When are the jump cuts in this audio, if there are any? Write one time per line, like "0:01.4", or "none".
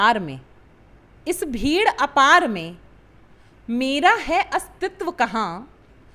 none